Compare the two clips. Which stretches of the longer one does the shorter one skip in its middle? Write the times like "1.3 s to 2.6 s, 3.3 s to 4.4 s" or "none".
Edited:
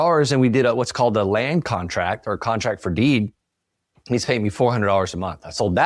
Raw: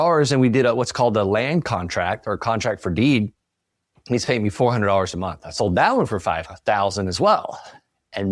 none